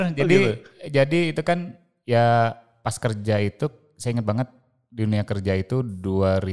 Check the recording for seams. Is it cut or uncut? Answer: uncut